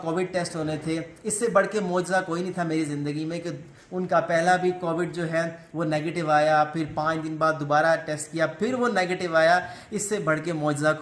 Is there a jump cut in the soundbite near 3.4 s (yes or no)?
no